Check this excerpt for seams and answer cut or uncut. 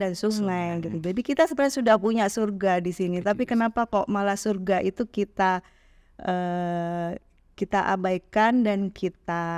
uncut